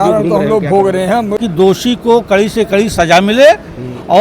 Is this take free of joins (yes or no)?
no